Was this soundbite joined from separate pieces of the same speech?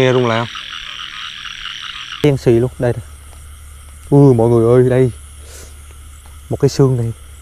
yes; 1 cut; at 2.2 s

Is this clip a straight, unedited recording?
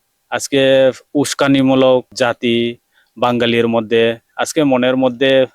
no; 2 cuts; at 2.1 s, 4.3 s

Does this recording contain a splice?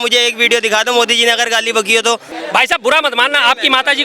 yes; 1 cut; at 2.3 s

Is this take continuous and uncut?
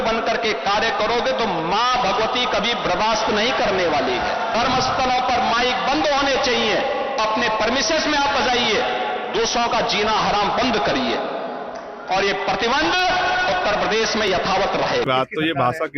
no; 2 cuts; at 4.5 s, 15.1 s

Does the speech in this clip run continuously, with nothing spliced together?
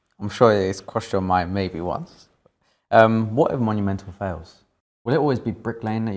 no; 1 cut; at 4.9 s

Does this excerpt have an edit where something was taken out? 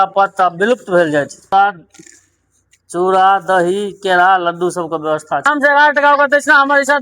yes; 2 cuts; at 1.5 s, 5.5 s

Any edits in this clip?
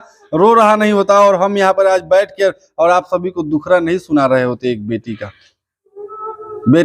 no; 0 cuts

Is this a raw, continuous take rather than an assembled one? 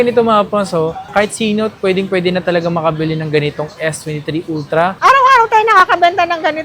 no; 1 cut; at 5.0 s

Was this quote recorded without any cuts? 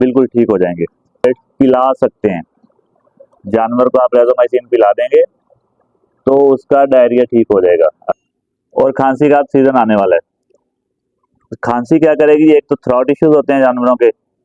no; 2 cuts; at 1.2 s, 8.0 s

